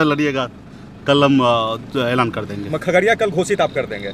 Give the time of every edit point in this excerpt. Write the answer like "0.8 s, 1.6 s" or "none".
none